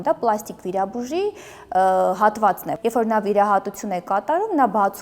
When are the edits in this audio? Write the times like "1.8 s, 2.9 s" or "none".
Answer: 2.7 s